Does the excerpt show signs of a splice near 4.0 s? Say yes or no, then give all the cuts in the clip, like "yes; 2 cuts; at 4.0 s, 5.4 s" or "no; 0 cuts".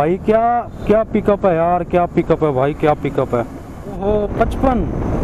yes; 1 cut; at 4.0 s